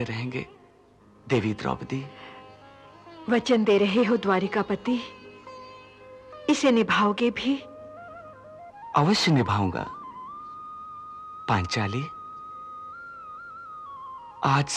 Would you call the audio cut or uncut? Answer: uncut